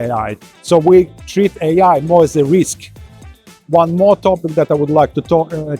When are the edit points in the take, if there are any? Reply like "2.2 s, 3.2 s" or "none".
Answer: 3.2 s